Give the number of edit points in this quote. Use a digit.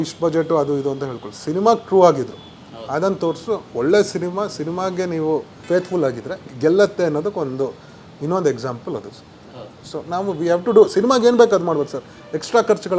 0